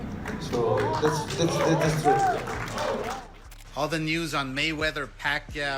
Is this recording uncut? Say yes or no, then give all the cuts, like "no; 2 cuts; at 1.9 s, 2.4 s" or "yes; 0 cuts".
no; 1 cut; at 3.4 s